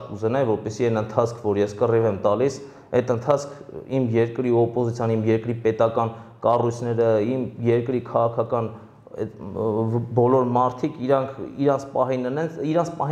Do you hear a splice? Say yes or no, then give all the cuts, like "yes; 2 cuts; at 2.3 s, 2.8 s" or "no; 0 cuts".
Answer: no; 0 cuts